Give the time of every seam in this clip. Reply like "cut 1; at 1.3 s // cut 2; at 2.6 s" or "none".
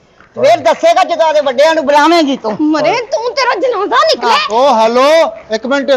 none